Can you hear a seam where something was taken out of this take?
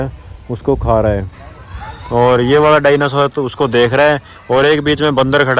no; 0 cuts

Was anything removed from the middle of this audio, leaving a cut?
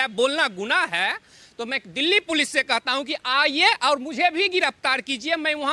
no; 0 cuts

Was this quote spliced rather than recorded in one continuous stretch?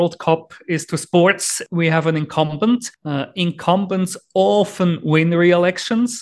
yes; 1 cut; at 1.5 s

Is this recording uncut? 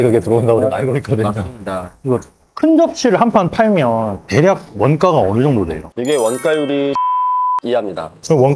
no; 1 cut; at 1.9 s

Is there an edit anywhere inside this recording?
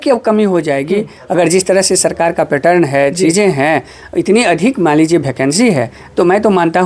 no; 0 cuts

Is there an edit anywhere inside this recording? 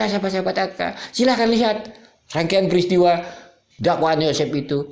no; 0 cuts

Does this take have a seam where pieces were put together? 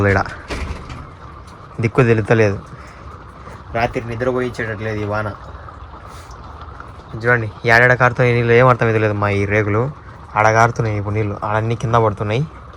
no; 0 cuts

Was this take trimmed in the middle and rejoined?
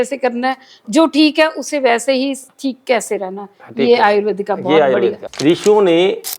yes; 1 cut; at 5.3 s

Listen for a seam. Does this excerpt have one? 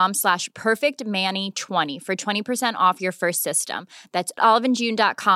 yes; 1 cut; at 1.9 s

